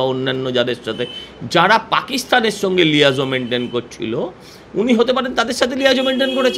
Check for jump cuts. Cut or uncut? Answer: uncut